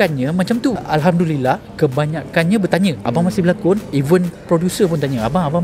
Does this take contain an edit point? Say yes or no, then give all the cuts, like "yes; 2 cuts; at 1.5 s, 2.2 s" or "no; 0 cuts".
yes; 2 cuts; at 0.9 s, 2.7 s